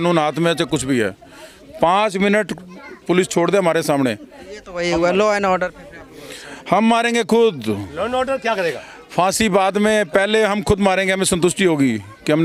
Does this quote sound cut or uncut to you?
uncut